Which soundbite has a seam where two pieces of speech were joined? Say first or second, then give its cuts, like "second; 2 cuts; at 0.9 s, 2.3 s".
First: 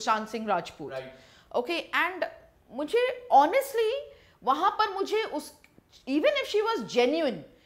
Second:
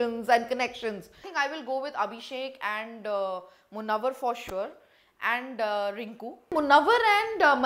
second; 2 cuts; at 1.2 s, 6.5 s